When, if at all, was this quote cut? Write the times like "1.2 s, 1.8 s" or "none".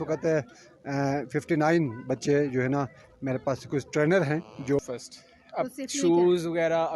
4.8 s